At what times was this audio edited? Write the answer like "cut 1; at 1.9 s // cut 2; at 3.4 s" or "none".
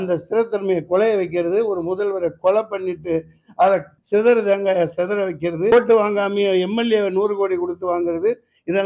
cut 1; at 3.9 s // cut 2; at 5.7 s